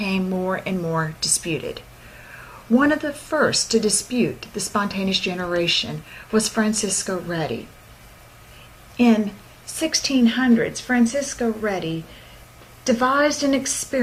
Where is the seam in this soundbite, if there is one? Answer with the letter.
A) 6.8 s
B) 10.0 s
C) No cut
C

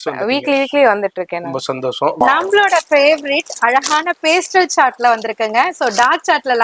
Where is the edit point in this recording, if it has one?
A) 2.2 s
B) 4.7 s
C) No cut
A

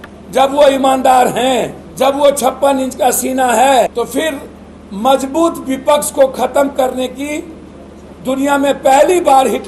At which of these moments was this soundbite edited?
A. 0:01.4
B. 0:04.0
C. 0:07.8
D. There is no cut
D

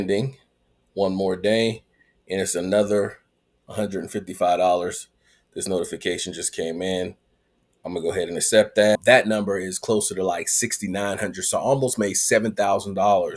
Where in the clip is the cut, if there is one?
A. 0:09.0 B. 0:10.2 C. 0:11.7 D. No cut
A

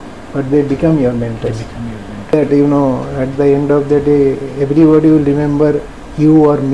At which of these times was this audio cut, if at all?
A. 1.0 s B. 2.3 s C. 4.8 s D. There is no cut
B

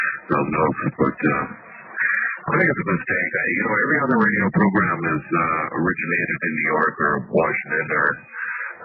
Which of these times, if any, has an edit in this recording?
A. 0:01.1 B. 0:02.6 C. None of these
A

